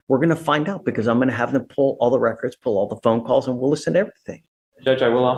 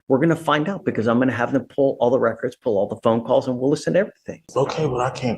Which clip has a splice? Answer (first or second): second